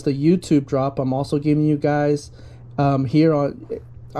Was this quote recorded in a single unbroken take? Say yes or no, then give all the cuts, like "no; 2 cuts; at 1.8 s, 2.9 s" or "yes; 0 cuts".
yes; 0 cuts